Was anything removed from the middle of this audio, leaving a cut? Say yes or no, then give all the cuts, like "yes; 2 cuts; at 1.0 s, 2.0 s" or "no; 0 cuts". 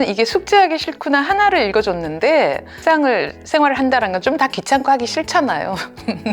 yes; 1 cut; at 2.8 s